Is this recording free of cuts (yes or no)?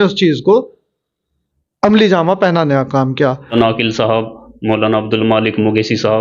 no